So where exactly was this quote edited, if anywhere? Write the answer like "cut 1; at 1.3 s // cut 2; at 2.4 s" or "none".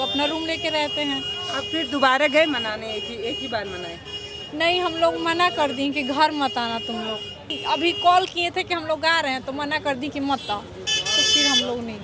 cut 1; at 1.4 s // cut 2; at 7.6 s